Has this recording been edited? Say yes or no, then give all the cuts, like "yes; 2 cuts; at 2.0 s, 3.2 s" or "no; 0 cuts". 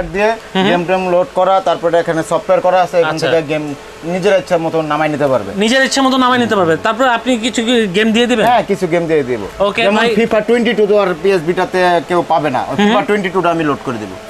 no; 0 cuts